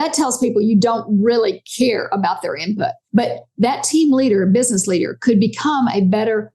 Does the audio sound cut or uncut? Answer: cut